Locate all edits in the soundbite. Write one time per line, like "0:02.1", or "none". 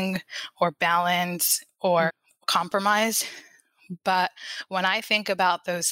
0:02.1